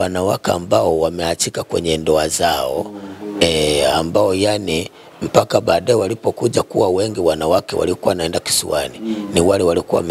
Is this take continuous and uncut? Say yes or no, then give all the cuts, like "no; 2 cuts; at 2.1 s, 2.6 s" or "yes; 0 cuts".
yes; 0 cuts